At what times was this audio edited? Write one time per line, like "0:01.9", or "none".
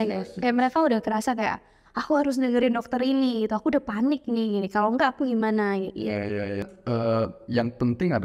0:06.7